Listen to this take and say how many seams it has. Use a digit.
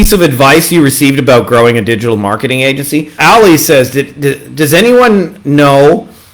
1